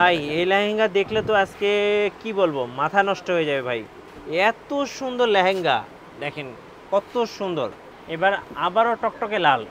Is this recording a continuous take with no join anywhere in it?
no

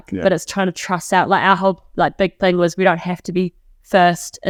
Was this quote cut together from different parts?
no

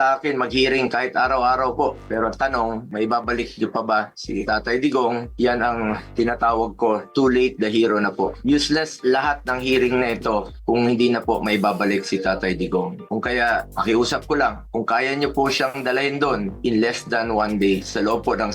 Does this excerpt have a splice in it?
no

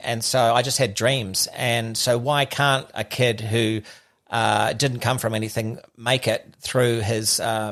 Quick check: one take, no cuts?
yes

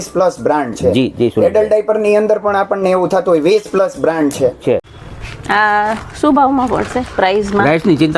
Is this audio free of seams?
no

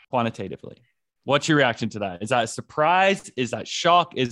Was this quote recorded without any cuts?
yes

